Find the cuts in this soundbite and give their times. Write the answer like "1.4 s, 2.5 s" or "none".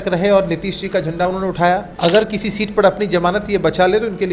1.9 s